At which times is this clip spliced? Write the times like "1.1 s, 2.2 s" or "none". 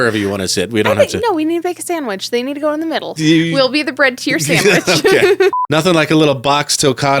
3.1 s, 5.6 s